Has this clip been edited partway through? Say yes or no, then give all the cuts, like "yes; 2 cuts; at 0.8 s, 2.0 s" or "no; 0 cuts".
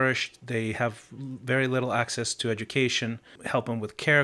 yes; 1 cut; at 3.3 s